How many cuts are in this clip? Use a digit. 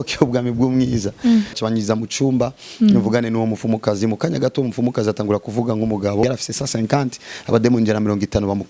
2